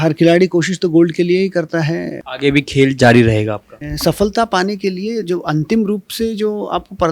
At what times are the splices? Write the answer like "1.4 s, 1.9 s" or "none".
2.1 s, 3.7 s